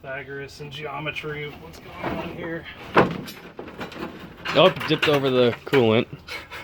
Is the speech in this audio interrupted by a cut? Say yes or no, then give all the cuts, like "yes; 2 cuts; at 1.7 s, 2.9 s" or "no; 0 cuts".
no; 0 cuts